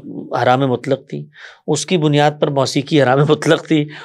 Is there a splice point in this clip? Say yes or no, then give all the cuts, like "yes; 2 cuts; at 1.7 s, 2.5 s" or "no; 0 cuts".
no; 0 cuts